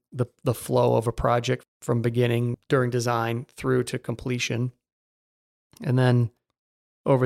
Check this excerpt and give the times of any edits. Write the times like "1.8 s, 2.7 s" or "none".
1.6 s, 2.5 s